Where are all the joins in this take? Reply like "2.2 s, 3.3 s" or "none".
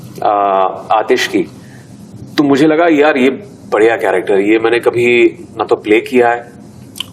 none